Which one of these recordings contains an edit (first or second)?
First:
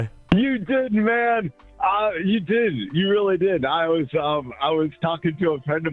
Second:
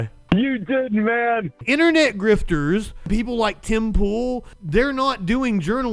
second